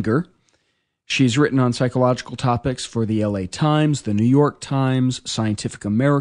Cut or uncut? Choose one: cut